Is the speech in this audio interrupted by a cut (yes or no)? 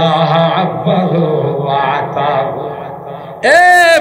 no